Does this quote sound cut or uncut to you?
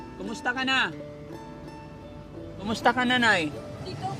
cut